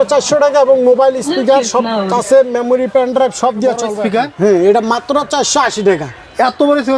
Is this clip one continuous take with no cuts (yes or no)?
no